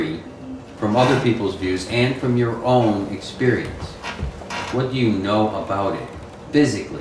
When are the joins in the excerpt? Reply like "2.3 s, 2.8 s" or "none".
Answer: 3.2 s